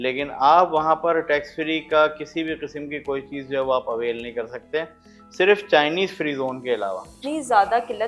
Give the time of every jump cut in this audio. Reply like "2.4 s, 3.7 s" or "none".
7.1 s